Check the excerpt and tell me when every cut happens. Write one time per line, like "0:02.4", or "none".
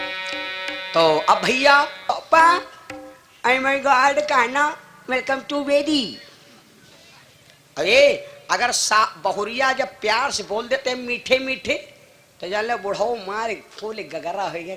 0:02.1